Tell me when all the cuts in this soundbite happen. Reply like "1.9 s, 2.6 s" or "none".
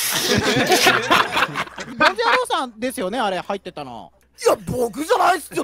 1.9 s, 4.0 s